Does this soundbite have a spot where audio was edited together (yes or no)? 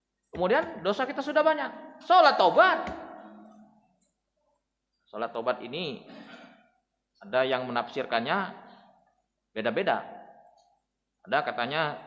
no